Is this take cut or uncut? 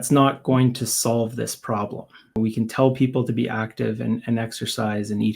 cut